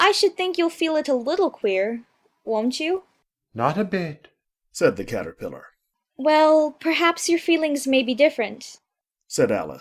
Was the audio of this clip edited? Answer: no; 0 cuts

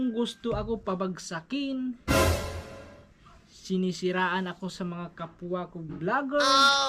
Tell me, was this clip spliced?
no; 0 cuts

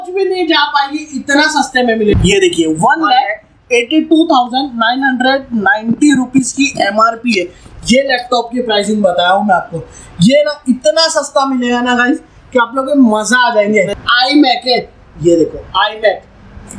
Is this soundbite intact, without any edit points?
no; 2 cuts; at 2.1 s, 13.9 s

